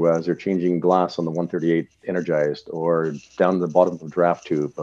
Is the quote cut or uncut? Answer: uncut